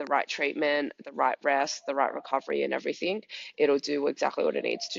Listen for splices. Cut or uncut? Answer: uncut